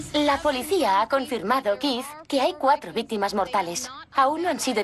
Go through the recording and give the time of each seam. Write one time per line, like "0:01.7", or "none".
none

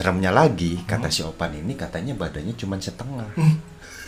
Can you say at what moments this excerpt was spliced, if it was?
none

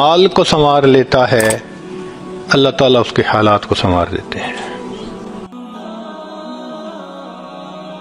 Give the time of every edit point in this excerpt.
0:05.5

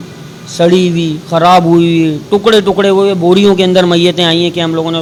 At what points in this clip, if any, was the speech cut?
none

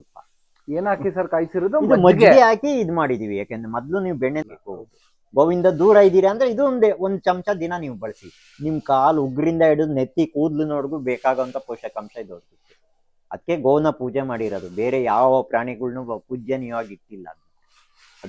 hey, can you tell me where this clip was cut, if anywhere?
0:04.4

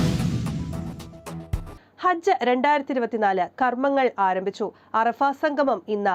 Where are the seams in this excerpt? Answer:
none

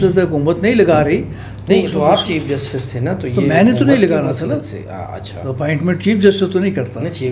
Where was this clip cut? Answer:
none

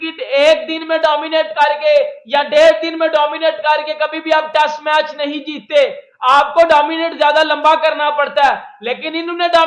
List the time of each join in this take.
none

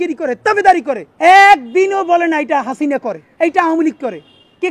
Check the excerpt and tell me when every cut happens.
0:01.0
0:03.2

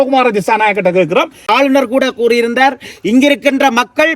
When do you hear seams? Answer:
0:01.5

